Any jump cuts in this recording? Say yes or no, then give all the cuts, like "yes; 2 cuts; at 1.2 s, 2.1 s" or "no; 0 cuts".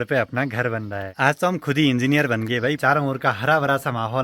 yes; 2 cuts; at 1.1 s, 2.8 s